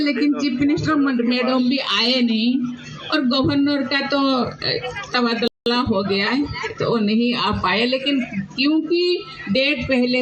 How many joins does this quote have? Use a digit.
0